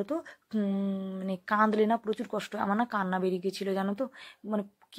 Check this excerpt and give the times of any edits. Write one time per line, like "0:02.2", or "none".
none